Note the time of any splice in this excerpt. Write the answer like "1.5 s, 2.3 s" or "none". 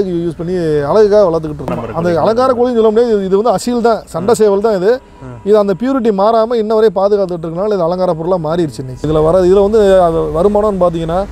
1.8 s, 9.1 s